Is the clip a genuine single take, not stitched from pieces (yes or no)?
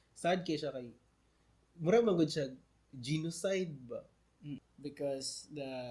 no